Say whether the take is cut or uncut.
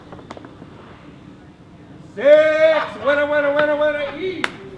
uncut